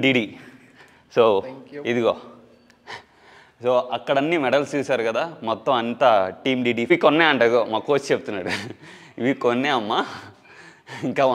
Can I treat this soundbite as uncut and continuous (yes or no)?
no